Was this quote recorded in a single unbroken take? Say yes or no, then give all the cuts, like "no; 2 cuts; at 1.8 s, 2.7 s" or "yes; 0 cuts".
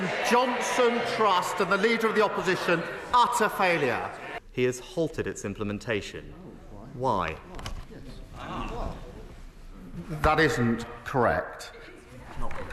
no; 1 cut; at 4.2 s